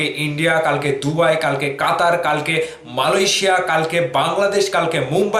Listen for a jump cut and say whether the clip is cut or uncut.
uncut